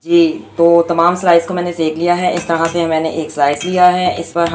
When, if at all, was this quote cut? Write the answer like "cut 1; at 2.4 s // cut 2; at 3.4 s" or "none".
none